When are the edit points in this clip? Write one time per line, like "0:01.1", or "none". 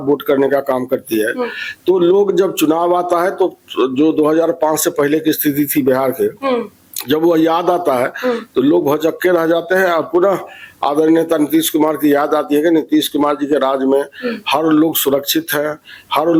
none